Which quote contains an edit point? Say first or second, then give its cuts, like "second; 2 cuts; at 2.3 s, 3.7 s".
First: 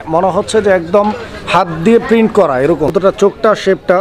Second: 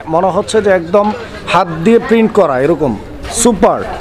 first; 1 cut; at 2.9 s